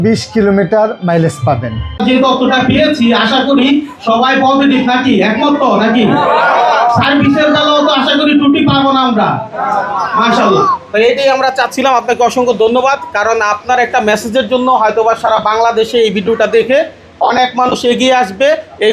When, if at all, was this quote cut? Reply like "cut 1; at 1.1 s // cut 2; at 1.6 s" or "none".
cut 1; at 2.0 s